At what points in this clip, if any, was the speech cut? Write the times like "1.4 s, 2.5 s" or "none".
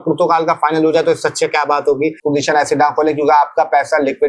2.2 s

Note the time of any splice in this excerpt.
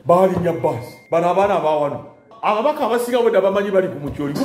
0.9 s, 2.3 s

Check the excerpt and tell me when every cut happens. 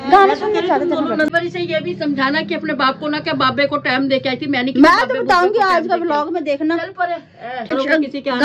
1.3 s, 5.2 s, 7.7 s

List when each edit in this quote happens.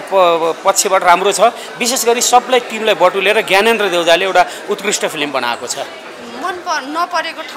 none

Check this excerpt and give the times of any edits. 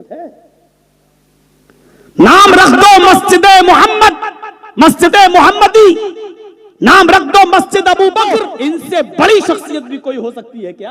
8.5 s

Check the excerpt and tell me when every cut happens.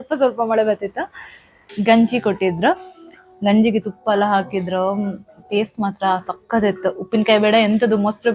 1.6 s

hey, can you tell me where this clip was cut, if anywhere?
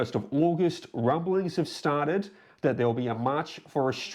none

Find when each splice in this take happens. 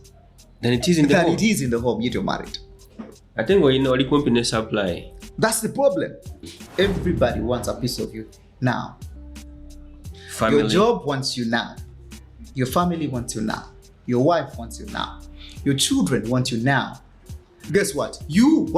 6.6 s

